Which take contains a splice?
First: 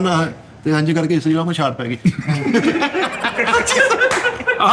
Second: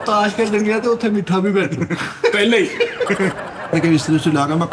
second; 1 cut; at 3.7 s

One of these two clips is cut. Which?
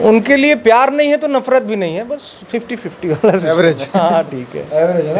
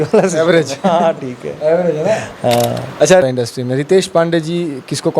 second; 1 cut; at 3.2 s

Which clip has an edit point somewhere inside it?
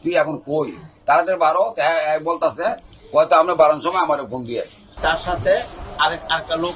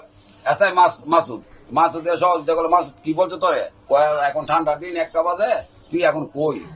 first; 1 cut; at 4.9 s

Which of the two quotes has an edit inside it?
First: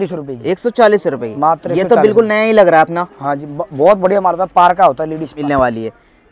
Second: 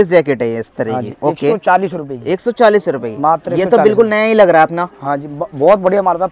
first; 1 cut; at 5.4 s

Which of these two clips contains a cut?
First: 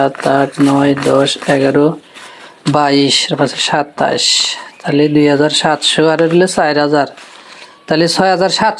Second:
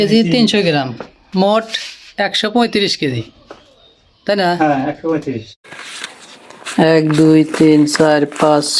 second; 1 cut; at 5.9 s

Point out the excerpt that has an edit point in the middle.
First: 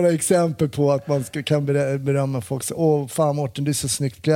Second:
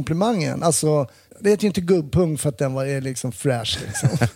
second; 1 cut; at 1.2 s

